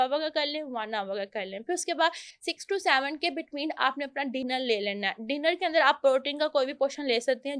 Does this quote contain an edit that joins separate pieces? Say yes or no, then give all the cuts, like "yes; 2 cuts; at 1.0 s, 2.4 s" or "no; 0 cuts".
no; 0 cuts